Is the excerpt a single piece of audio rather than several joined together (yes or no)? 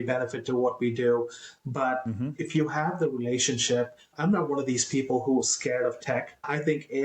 no